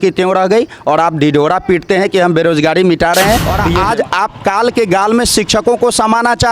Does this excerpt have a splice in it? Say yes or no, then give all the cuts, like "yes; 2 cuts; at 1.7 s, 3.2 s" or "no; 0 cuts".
yes; 1 cut; at 3.6 s